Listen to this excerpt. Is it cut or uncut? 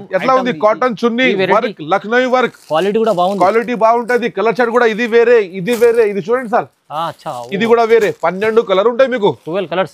uncut